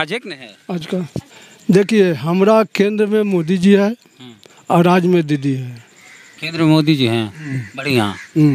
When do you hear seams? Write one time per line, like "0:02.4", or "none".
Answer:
0:01.2

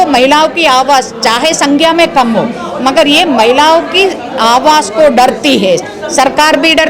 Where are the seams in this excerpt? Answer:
none

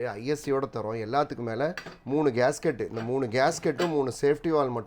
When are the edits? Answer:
none

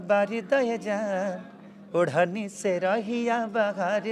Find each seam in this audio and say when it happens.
none

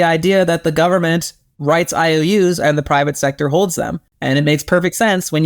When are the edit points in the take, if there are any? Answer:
0:04.1

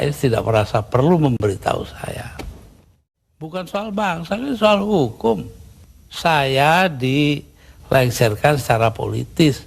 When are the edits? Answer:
0:03.0

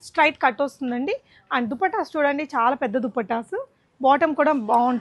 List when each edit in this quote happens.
none

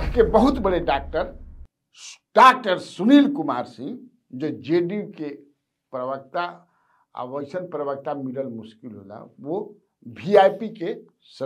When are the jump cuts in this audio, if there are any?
none

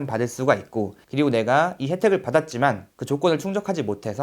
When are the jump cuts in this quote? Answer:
0:01.0

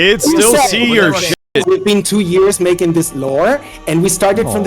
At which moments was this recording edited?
0:01.3

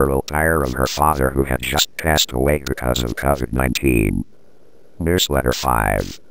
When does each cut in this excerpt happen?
0:05.0

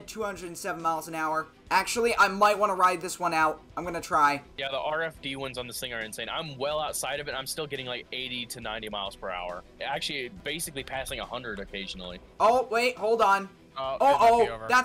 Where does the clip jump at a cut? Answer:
0:01.5
0:04.5
0:10.4

